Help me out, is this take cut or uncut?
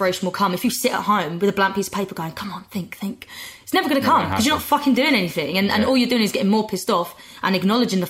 uncut